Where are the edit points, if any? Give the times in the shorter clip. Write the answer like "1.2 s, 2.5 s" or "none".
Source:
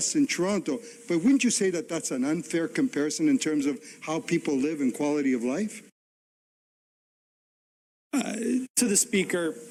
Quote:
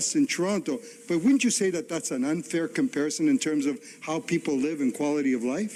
none